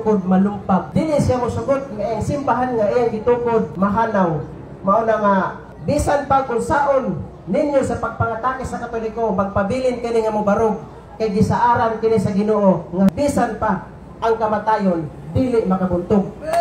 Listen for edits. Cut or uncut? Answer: cut